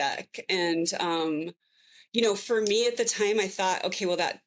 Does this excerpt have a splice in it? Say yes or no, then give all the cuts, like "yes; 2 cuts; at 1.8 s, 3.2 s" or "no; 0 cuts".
no; 0 cuts